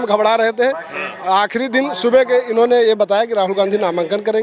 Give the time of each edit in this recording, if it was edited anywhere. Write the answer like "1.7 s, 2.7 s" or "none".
none